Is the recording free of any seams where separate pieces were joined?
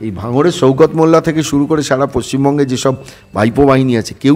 yes; 0 cuts

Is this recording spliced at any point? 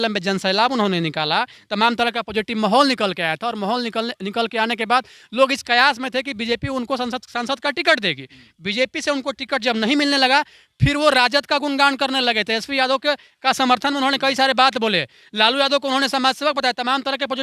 no; 0 cuts

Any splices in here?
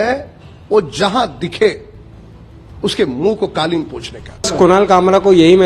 yes; 1 cut; at 4.5 s

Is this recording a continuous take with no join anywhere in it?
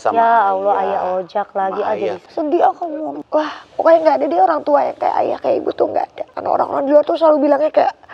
no; 3 cuts; at 2.2 s, 3.2 s, 6.3 s

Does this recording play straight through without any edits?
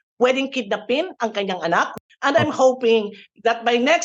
no; 1 cut; at 2.0 s

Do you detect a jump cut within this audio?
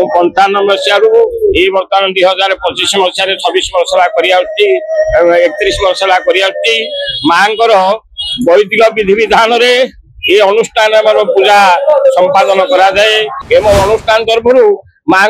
yes; 1 cut; at 13.4 s

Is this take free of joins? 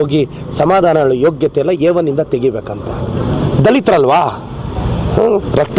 no; 1 cut; at 3.0 s

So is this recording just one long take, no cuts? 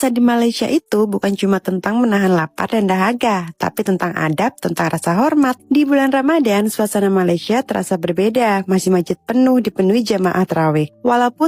yes; 0 cuts

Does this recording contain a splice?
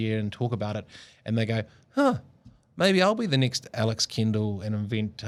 no; 0 cuts

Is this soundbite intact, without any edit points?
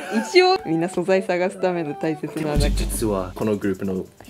no; 1 cut; at 3.3 s

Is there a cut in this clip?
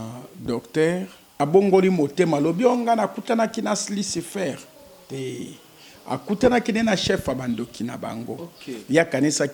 yes; 1 cut; at 1.2 s

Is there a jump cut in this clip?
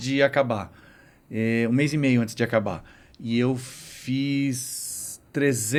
no; 0 cuts

